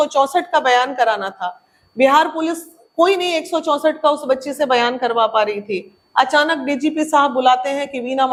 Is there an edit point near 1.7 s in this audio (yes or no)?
no